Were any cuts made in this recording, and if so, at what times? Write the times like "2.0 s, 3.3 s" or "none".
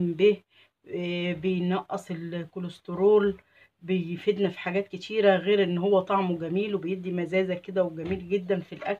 none